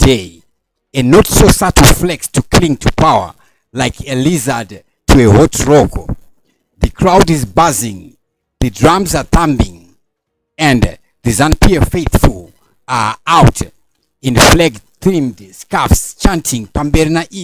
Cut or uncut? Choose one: cut